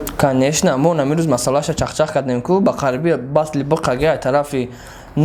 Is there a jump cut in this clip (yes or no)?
no